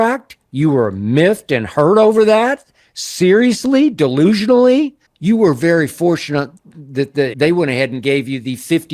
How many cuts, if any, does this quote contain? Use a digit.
2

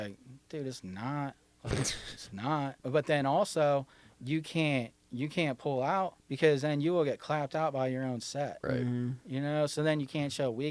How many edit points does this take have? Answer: 2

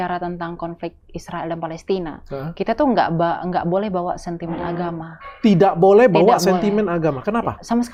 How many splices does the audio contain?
0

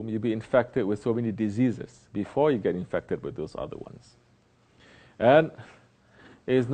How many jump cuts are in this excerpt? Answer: 1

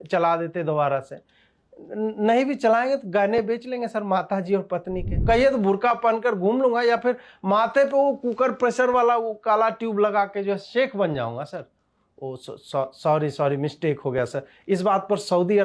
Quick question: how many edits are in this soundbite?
1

